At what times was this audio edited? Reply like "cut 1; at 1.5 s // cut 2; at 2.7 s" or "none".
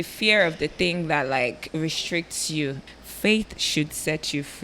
cut 1; at 2.8 s

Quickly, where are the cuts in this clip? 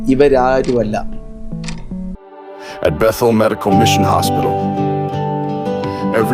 cut 1; at 2.2 s

